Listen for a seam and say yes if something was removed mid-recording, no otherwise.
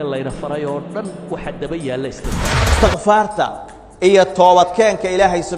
yes